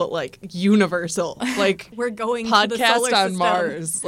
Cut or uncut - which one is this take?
cut